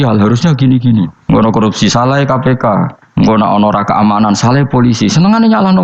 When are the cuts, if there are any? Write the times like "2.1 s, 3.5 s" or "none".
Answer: 1.2 s, 3.0 s

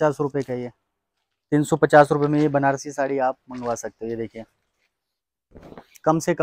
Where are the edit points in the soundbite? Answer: none

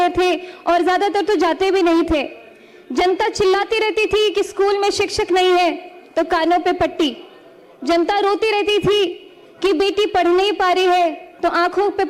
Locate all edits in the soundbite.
none

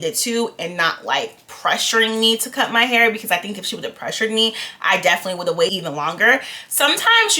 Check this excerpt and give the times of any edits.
5.7 s

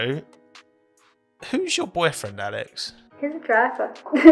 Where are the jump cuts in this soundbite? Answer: 3.1 s

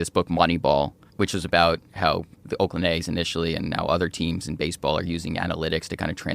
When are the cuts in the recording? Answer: 1.1 s, 2.5 s

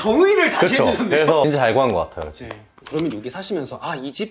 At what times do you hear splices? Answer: 1.4 s

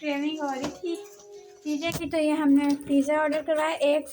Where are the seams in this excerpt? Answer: none

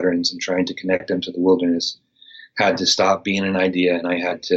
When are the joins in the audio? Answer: none

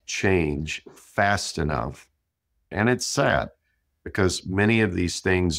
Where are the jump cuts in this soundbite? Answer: 2.7 s

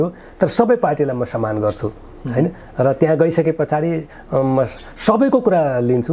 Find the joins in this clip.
none

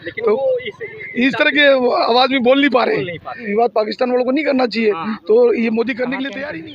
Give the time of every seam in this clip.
3.4 s

